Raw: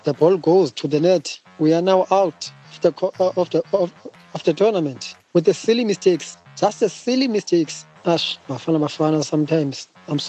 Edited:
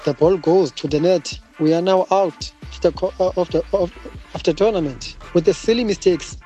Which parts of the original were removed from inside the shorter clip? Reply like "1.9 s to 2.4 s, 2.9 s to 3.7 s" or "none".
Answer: none